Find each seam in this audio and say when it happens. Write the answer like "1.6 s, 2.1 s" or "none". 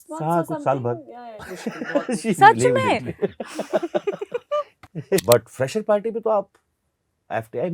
1.4 s, 5.2 s